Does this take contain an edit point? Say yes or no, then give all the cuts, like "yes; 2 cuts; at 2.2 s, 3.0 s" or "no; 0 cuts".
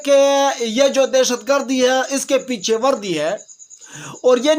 no; 0 cuts